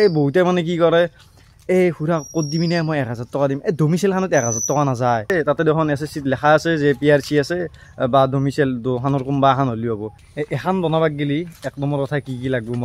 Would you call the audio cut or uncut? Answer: cut